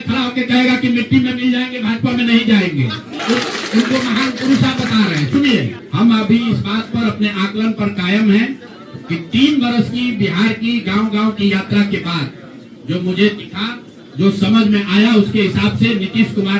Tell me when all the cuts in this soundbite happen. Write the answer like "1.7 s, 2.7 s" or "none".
3.1 s, 5.8 s